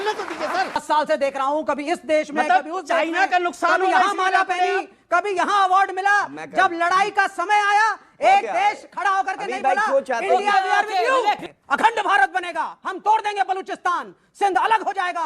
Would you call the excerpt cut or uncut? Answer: cut